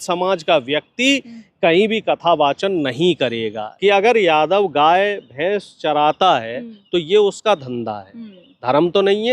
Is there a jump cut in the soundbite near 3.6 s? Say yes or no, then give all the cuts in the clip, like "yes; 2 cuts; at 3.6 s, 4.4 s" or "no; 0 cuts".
yes; 1 cut; at 3.6 s